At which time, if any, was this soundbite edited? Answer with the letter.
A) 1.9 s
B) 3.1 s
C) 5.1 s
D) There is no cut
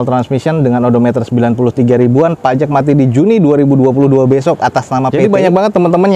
C